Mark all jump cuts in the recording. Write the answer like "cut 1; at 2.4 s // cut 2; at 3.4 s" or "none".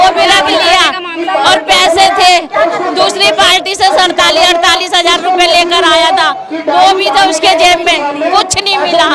none